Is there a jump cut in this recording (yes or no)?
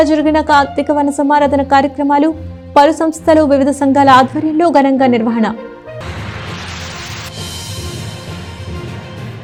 no